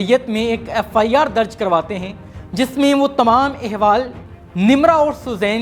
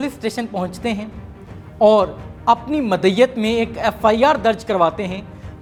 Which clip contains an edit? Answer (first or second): first